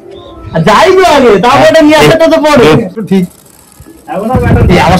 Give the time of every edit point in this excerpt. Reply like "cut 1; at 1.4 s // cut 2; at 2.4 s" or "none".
cut 1; at 3.0 s